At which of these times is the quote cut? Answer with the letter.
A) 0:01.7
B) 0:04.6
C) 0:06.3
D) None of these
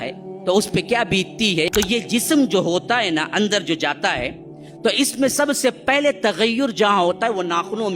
A